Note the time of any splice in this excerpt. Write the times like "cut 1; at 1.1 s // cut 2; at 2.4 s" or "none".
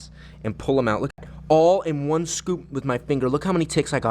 cut 1; at 1.2 s

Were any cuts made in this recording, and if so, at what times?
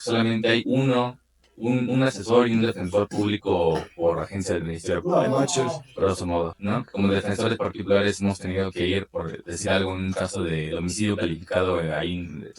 cut 1; at 6.6 s

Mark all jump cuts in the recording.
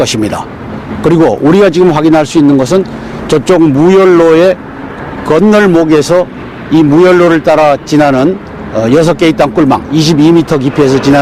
cut 1; at 1.7 s

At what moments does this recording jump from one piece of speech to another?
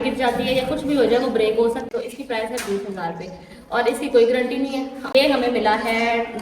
cut 1; at 1.9 s // cut 2; at 5.1 s

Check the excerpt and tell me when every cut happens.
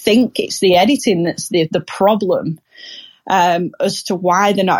none

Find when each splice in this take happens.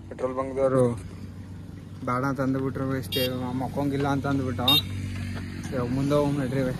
none

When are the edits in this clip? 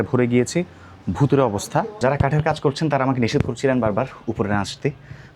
cut 1; at 2.0 s

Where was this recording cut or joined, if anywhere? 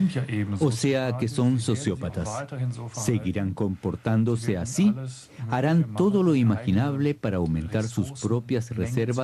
cut 1; at 3.2 s

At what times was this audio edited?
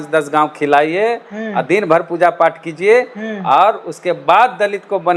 none

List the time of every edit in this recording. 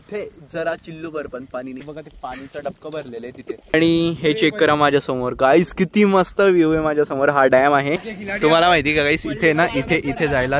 cut 1; at 1.9 s // cut 2; at 3.7 s // cut 3; at 8.1 s

